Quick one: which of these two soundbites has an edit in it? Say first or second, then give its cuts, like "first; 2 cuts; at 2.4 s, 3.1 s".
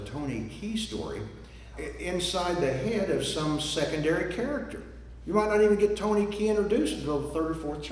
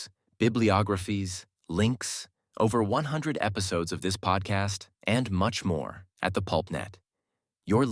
first; 1 cut; at 1.7 s